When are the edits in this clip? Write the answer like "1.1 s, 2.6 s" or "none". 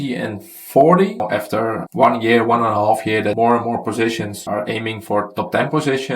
1.2 s, 3.4 s